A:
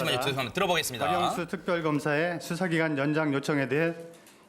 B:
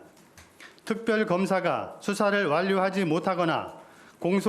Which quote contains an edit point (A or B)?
B